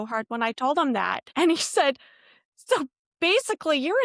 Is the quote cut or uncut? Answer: cut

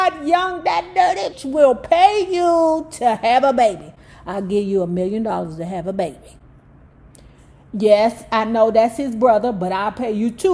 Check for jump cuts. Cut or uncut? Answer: cut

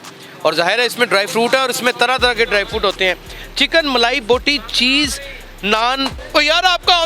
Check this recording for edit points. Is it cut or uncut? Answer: cut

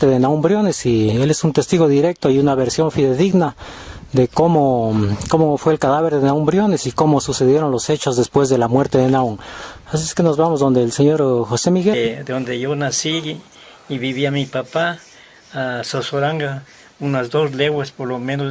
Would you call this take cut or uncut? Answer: uncut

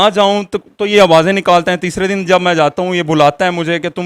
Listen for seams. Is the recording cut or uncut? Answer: uncut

